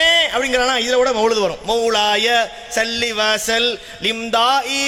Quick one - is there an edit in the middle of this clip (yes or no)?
no